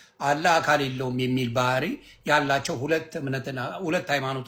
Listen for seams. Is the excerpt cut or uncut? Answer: uncut